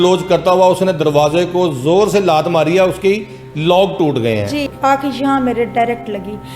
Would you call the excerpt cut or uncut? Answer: cut